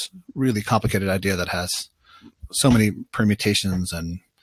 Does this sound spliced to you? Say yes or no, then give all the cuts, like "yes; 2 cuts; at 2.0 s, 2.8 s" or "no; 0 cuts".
no; 0 cuts